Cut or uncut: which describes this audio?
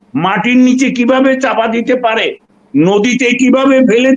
uncut